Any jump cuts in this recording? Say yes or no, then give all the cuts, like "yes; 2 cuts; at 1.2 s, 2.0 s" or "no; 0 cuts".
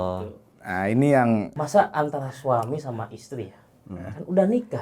yes; 1 cut; at 1.6 s